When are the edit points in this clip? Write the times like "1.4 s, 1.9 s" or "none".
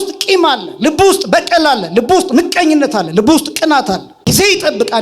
4.1 s

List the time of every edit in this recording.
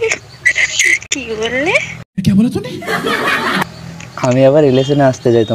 none

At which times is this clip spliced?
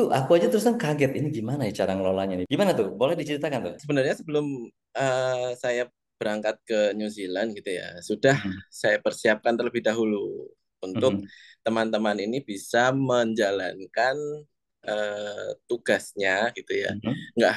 2.4 s, 3.8 s

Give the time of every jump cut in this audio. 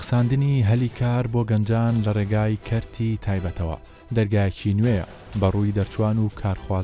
none

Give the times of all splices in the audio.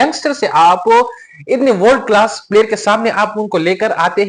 none

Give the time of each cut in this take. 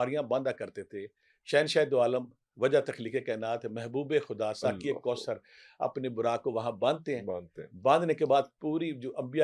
none

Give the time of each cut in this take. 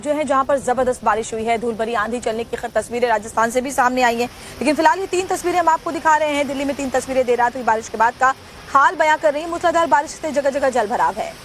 7.9 s

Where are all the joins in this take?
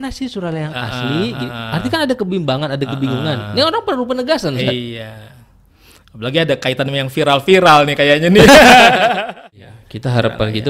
9.2 s

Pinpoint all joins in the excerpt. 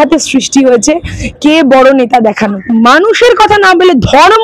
2.6 s

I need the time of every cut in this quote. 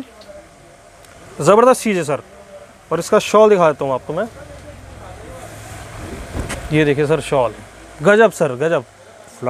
none

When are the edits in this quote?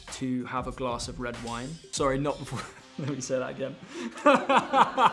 1.9 s

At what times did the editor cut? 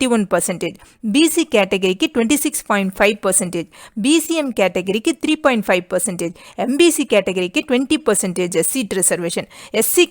8.9 s

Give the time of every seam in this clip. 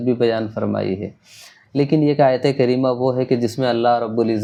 none

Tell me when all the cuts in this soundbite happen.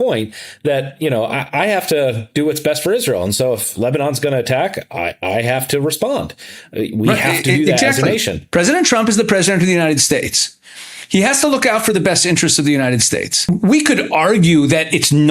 8.4 s, 13.5 s

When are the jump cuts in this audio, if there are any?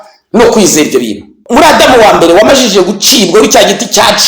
1.3 s

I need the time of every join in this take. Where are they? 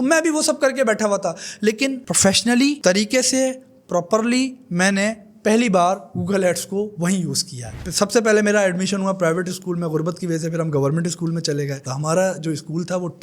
7.7 s, 11.8 s

